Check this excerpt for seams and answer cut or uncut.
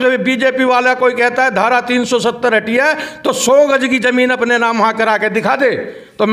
uncut